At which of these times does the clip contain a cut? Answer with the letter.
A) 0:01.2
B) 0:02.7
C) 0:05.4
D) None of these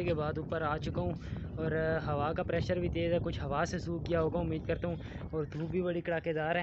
D